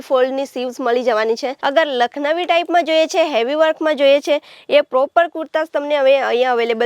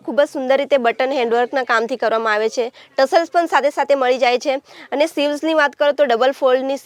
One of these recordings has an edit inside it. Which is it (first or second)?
first